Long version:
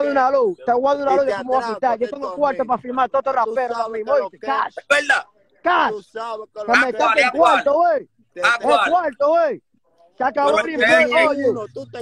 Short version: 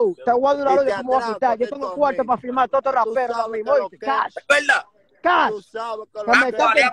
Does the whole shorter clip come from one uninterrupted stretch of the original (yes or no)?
yes